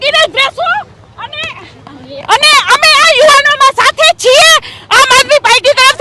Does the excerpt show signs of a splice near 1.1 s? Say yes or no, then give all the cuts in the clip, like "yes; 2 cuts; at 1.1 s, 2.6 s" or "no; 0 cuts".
no; 0 cuts